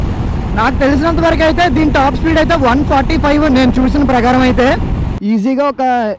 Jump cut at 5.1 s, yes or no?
yes